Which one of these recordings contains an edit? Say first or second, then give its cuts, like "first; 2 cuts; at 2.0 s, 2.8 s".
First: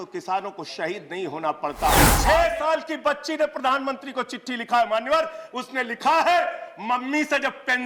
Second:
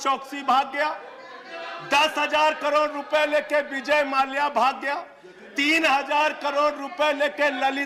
first; 1 cut; at 2.1 s